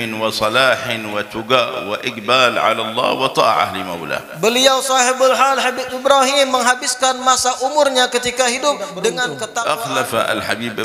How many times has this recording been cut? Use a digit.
1